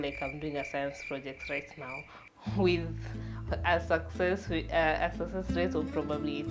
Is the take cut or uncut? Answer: uncut